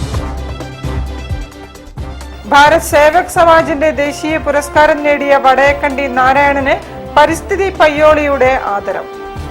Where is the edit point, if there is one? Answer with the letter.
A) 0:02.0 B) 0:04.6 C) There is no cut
A